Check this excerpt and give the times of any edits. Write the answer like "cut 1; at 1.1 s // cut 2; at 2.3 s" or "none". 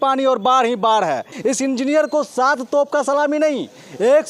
cut 1; at 1.3 s